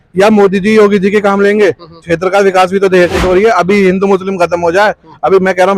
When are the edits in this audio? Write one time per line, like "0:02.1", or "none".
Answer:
0:03.2